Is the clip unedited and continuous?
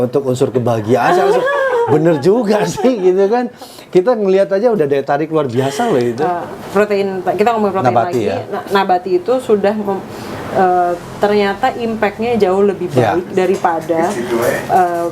no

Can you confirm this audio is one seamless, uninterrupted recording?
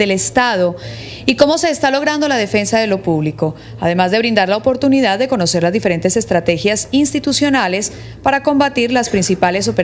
yes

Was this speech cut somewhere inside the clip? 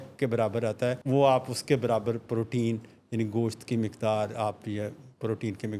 yes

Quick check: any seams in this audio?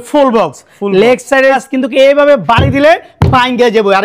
yes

